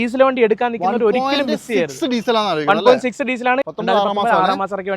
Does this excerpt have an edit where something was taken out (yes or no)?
yes